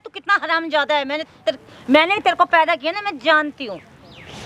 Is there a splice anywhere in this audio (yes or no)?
no